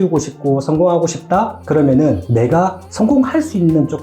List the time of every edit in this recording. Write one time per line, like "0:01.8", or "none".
0:02.2